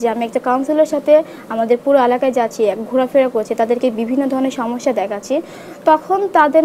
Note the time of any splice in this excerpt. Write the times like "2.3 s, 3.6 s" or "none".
none